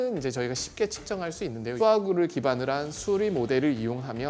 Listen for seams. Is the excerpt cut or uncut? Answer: cut